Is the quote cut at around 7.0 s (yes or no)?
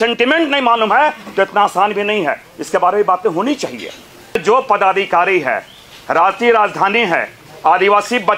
no